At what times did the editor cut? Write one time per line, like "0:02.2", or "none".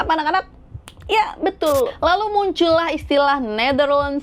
0:01.9